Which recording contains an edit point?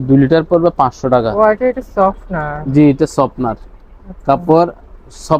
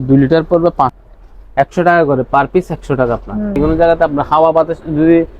second; 2 cuts; at 1.0 s, 3.6 s

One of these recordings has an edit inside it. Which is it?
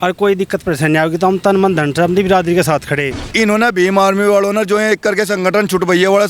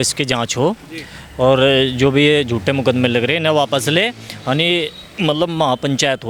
first; 1 cut; at 3.3 s

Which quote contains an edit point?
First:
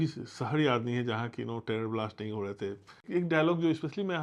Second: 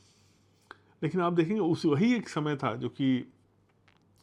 first; 1 cut; at 3.0 s

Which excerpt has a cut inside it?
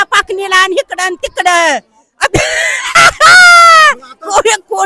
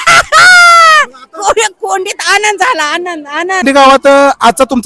second; 1 cut; at 3.6 s

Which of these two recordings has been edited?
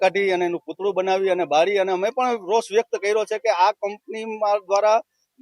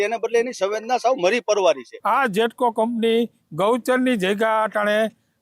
second; 1 cut; at 1.9 s

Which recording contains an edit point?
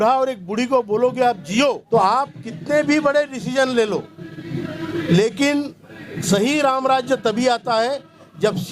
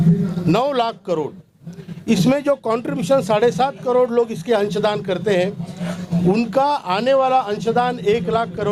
first; 1 cut; at 1.8 s

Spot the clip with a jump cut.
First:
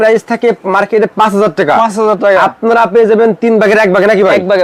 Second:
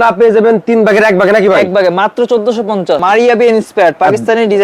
second; 1 cut; at 3.0 s

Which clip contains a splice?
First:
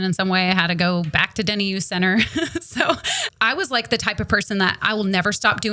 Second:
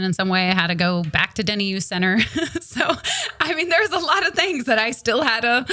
first; 1 cut; at 3.3 s

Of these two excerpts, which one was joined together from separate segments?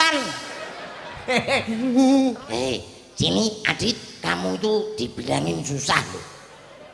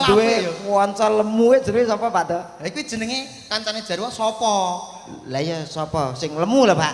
first; 1 cut; at 2.4 s

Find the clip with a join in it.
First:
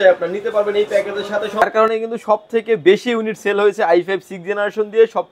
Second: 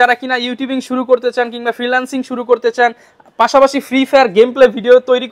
first; 1 cut; at 1.6 s

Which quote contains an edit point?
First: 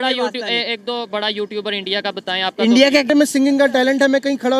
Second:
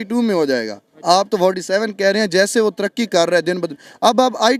first; 1 cut; at 3.1 s

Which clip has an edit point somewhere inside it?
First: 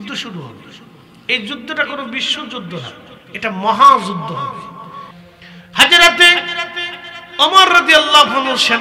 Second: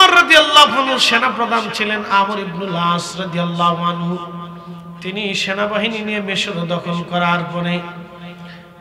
first; 1 cut; at 5.1 s

